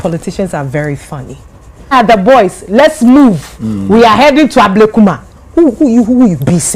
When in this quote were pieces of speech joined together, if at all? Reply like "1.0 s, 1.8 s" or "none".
1.9 s